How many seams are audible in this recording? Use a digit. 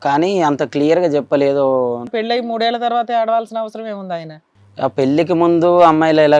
2